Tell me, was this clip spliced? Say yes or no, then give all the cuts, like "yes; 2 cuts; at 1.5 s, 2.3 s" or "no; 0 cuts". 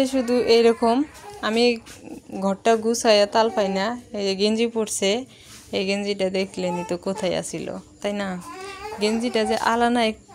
no; 0 cuts